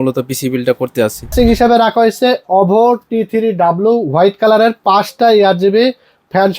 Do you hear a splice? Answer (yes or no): yes